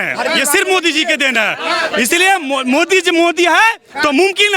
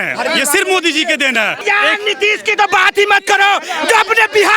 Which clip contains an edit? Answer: second; 1 cut; at 1.6 s

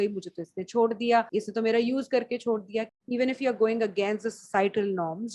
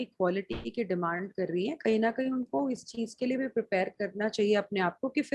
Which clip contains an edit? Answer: first; 2 cuts; at 1.3 s, 2.9 s

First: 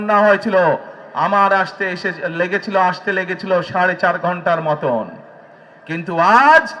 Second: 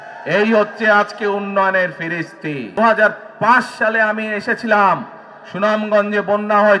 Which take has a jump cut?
second; 1 cut; at 2.7 s

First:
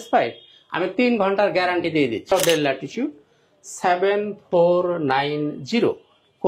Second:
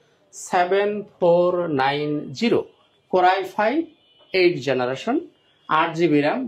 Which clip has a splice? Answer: first; 1 cut; at 2.3 s

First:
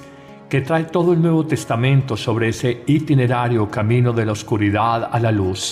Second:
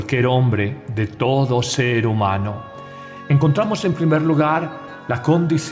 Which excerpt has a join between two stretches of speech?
first; 1 cut; at 3.3 s

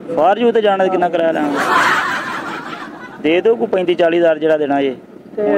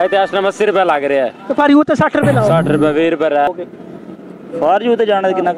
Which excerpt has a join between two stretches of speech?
second; 1 cut; at 3.5 s

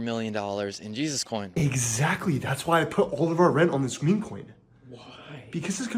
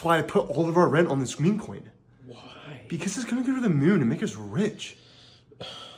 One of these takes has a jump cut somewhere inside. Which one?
first; 1 cut; at 1.5 s

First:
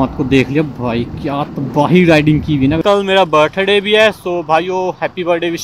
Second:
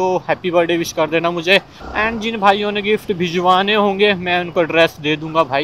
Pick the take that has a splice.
first; 1 cut; at 2.8 s

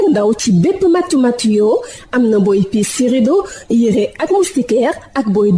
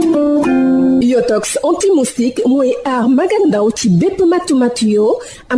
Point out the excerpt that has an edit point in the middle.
second; 1 cut; at 0.9 s

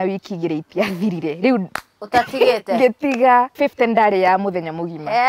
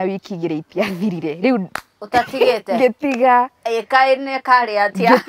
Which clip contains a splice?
first; 1 cut; at 3.5 s

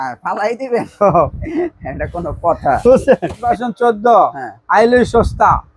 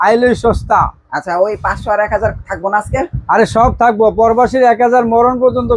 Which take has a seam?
first; 1 cut; at 3.6 s

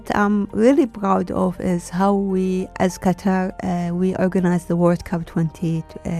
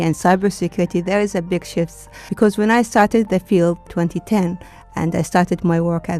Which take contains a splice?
second; 2 cuts; at 2.3 s, 3.9 s

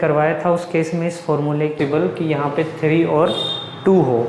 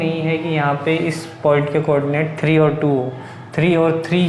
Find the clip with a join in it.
first; 1 cut; at 1.8 s

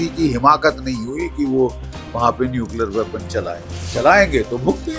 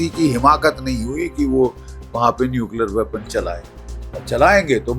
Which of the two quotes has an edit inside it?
first; 1 cut; at 3.7 s

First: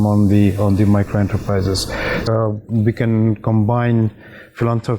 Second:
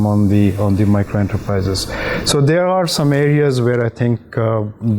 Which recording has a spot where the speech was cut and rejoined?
first; 1 cut; at 2.2 s

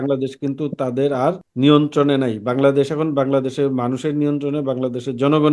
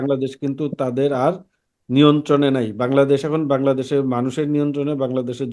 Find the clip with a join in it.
first; 1 cut; at 1.5 s

